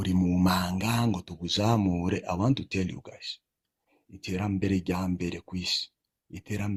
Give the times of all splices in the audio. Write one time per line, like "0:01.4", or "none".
none